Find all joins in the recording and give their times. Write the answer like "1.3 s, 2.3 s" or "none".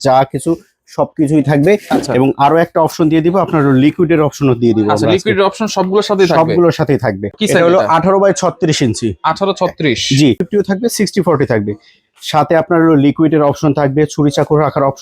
7.4 s, 10.4 s